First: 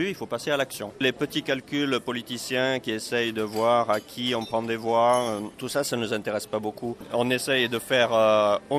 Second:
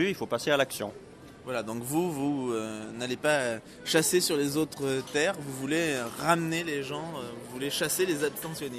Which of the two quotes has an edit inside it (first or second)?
first